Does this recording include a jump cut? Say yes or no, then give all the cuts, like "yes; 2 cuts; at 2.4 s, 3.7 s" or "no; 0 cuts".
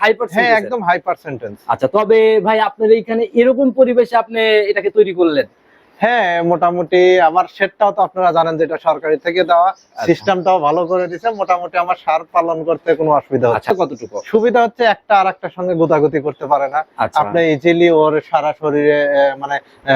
yes; 1 cut; at 13.7 s